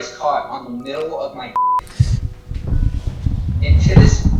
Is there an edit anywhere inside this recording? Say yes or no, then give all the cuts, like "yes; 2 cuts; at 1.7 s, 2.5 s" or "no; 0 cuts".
no; 0 cuts